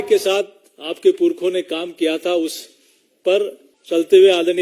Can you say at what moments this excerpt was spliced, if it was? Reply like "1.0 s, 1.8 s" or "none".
3.7 s